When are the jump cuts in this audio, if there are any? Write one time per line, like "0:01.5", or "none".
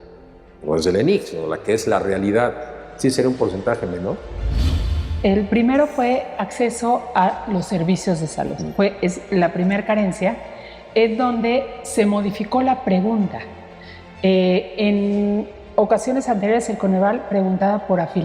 0:04.7